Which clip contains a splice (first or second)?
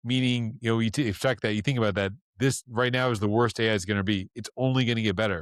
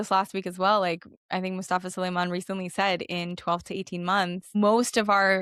second